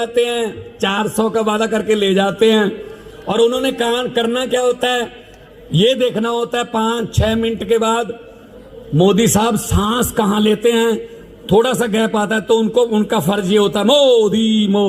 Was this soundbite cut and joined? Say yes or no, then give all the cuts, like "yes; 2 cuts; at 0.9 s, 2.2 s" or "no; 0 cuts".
no; 0 cuts